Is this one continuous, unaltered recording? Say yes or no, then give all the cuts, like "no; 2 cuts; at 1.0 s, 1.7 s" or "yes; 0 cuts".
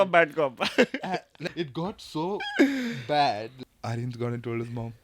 no; 2 cuts; at 1.4 s, 3.6 s